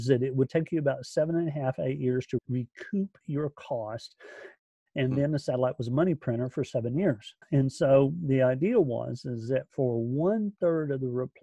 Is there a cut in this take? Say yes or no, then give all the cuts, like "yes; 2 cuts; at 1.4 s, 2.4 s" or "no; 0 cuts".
yes; 2 cuts; at 2.4 s, 7.4 s